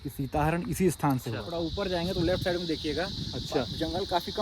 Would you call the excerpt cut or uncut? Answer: cut